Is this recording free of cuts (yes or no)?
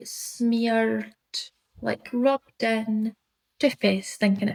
yes